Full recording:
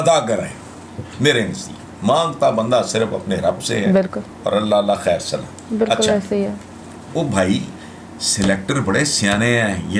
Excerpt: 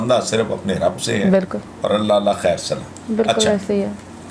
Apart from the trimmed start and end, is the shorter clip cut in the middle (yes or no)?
no